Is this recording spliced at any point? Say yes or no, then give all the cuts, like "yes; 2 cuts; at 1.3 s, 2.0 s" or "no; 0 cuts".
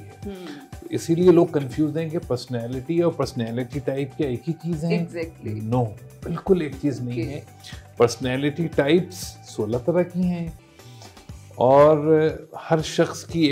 no; 0 cuts